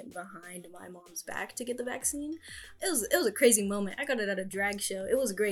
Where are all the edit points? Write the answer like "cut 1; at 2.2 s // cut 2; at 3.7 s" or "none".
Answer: cut 1; at 2.6 s